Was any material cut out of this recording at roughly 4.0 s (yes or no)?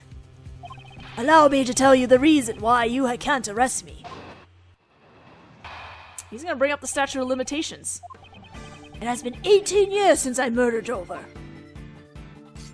yes